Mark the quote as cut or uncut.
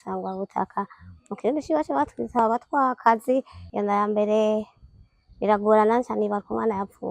cut